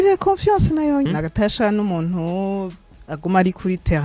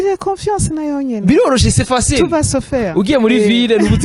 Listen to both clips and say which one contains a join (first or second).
first